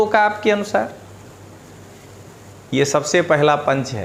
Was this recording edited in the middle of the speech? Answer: no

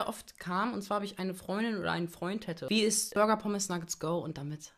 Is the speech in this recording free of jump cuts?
no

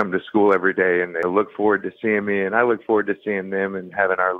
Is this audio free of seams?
no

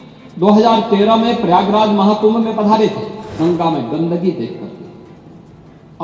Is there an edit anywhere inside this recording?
yes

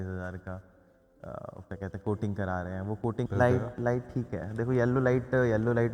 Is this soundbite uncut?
no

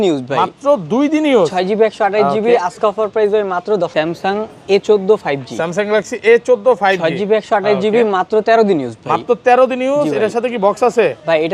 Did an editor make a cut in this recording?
yes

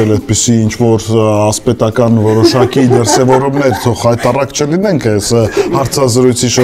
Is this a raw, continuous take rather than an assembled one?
yes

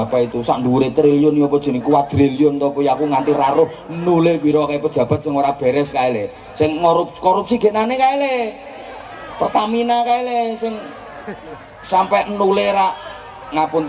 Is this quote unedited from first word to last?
yes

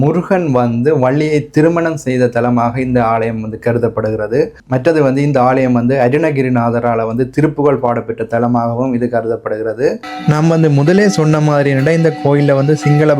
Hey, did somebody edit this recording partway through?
yes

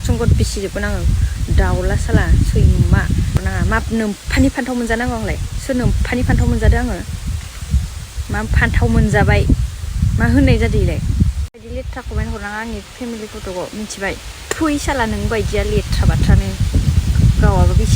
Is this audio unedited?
no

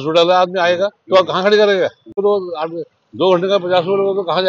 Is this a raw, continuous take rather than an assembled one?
no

